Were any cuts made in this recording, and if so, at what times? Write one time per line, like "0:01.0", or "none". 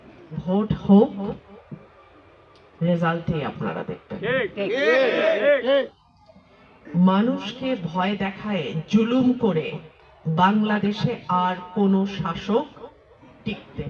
none